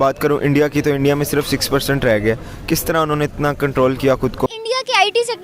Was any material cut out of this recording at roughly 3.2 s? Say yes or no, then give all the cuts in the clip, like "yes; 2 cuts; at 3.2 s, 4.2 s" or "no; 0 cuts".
no; 1 cut; at 4.5 s